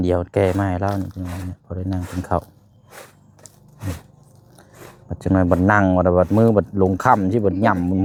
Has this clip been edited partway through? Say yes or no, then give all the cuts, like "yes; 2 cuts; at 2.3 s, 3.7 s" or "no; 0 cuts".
no; 0 cuts